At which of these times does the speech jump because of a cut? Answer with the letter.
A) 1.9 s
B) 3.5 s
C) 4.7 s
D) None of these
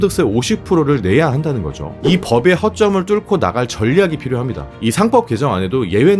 A